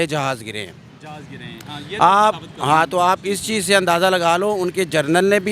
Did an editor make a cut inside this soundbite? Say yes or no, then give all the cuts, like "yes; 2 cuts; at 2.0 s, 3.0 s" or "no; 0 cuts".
no; 0 cuts